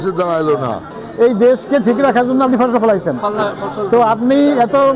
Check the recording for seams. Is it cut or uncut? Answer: cut